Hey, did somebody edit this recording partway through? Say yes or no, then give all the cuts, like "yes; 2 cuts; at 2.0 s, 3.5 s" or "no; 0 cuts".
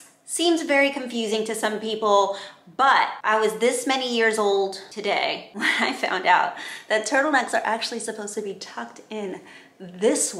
no; 0 cuts